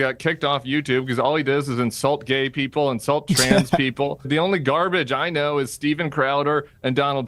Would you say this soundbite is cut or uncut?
cut